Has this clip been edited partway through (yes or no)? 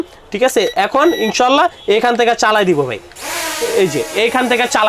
no